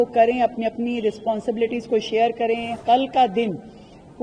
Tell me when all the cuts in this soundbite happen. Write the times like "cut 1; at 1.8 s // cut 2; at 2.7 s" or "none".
cut 1; at 2.8 s